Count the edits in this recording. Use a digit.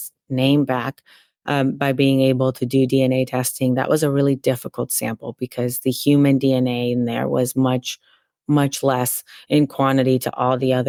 0